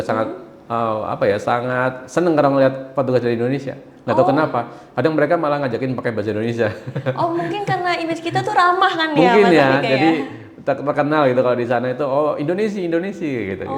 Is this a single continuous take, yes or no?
yes